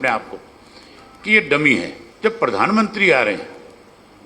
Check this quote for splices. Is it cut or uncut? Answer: cut